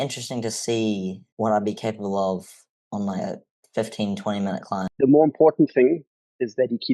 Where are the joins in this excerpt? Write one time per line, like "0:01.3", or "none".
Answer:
0:01.2
0:04.9